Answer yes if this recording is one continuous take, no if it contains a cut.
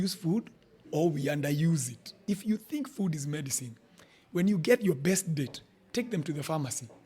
no